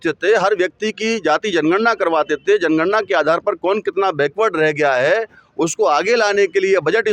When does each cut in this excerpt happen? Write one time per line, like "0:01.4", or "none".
none

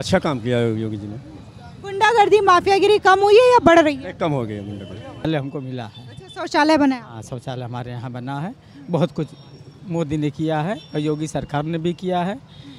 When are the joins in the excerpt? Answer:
0:05.3

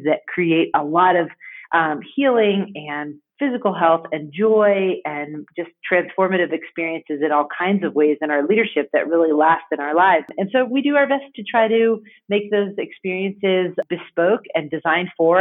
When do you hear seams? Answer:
0:10.3
0:13.8

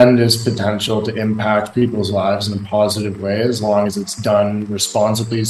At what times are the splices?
none

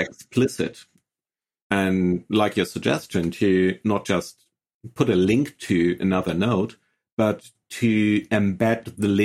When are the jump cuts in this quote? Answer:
0:01.6

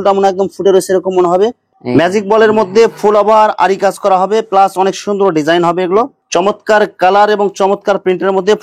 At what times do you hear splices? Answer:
0:01.7
0:06.2

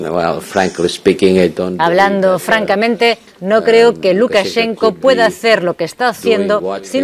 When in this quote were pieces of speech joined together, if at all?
none

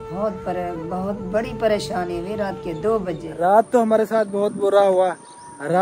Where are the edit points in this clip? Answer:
0:03.3

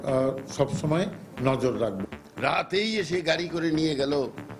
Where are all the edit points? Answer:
0:02.0

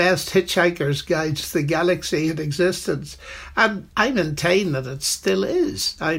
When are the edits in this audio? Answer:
0:03.8

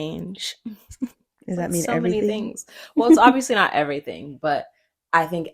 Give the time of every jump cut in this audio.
none

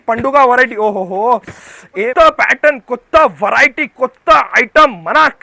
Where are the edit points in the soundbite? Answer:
0:02.1

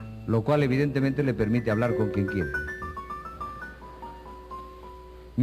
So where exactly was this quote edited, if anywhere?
0:01.1

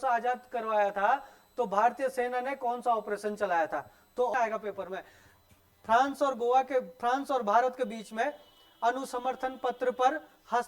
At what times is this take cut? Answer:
0:04.3

